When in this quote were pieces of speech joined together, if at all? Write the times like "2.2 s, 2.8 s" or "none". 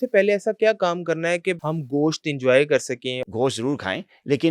1.6 s, 3.3 s

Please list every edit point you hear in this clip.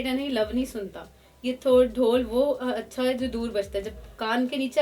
none

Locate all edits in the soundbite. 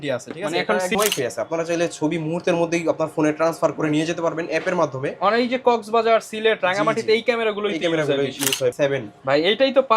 0.9 s, 8.8 s

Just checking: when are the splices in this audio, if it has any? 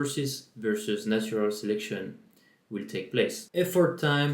3.4 s

